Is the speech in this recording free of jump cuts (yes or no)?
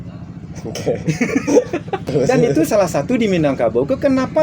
no